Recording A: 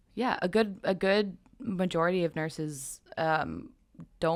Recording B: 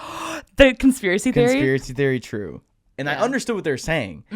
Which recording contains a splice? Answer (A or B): B